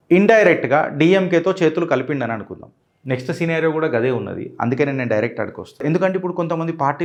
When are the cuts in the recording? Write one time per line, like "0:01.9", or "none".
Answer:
none